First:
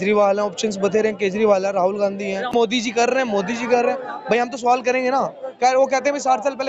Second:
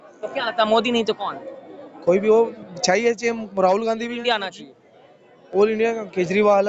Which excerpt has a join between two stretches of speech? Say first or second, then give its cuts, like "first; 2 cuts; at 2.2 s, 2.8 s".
first; 1 cut; at 2.5 s